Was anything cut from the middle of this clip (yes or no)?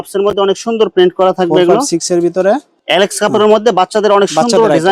yes